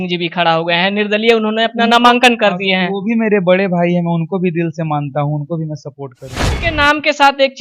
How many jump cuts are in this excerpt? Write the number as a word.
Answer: one